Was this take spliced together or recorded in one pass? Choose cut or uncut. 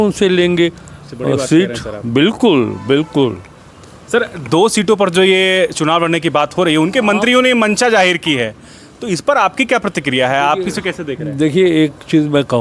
uncut